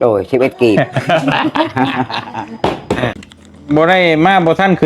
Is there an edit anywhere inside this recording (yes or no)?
yes